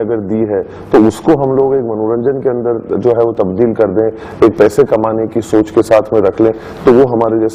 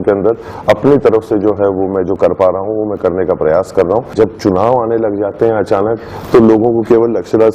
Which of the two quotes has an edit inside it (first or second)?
second